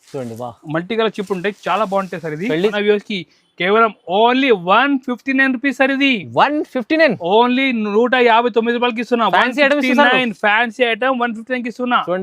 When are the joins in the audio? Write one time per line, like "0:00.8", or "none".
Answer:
0:02.7